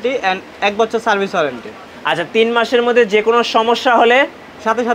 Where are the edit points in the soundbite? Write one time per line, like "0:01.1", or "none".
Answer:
none